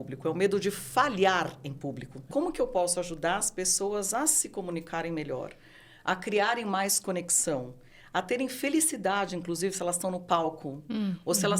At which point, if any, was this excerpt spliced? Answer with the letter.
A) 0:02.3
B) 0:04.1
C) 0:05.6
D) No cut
A